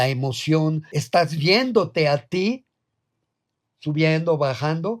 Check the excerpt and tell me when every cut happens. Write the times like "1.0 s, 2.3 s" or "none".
0.9 s